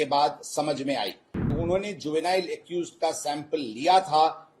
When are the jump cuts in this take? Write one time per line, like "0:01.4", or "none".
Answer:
0:01.6